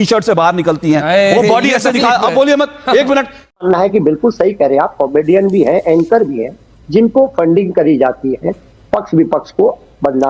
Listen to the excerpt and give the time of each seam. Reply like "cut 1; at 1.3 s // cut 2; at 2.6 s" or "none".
cut 1; at 3.6 s